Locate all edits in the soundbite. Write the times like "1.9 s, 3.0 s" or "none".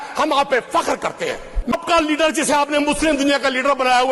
1.8 s